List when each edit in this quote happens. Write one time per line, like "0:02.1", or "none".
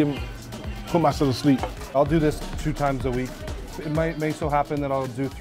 0:01.8